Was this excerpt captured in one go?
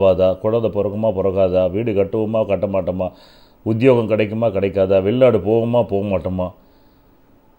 yes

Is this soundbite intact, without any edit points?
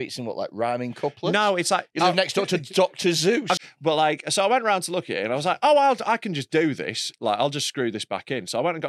no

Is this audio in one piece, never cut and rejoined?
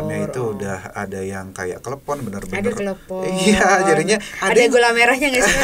yes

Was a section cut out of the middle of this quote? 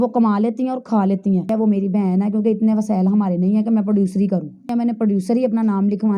yes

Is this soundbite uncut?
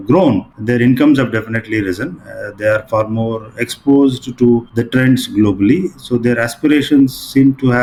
yes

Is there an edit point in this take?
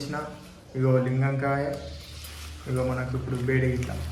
no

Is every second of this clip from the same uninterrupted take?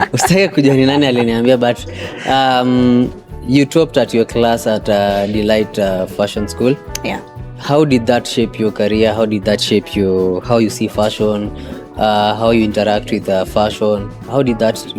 yes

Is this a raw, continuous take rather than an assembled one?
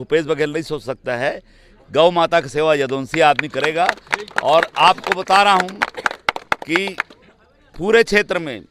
yes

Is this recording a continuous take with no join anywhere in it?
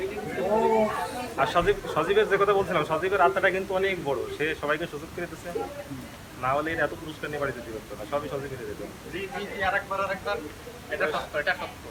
yes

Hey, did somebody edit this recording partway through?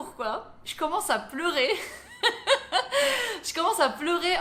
no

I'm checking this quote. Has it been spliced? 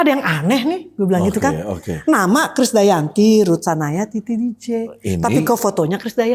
no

